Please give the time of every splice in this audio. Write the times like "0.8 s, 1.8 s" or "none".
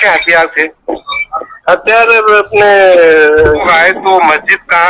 3.7 s